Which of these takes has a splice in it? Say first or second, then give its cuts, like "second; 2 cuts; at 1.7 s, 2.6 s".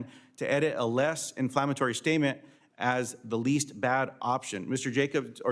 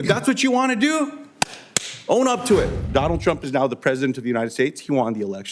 second; 1 cut; at 2.8 s